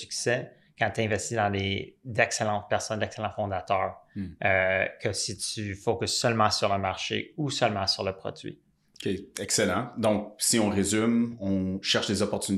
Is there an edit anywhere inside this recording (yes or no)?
no